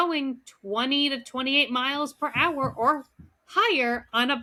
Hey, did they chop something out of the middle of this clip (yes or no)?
no